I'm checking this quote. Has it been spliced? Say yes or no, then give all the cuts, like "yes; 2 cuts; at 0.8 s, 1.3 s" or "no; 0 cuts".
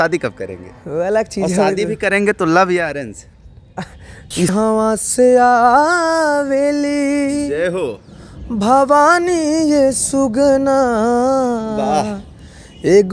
yes; 1 cut; at 4.5 s